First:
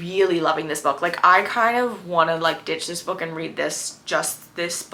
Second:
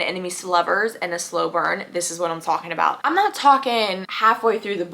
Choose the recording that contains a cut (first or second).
second